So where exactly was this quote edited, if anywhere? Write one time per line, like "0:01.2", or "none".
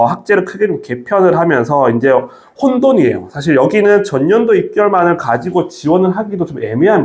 none

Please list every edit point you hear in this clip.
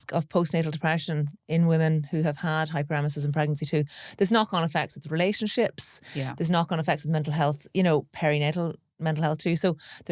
none

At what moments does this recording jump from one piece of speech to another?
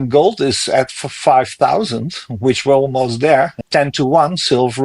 0:03.6

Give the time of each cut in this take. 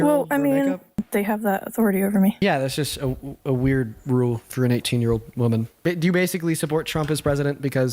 0:01.0
0:02.4
0:05.7

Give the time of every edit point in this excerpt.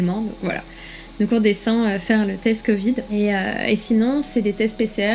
0:03.1

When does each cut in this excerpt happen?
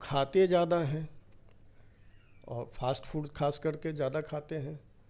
none

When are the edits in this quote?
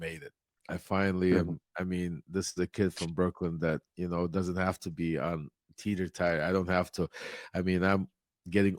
none

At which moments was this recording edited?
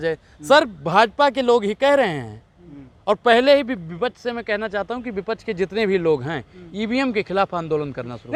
none

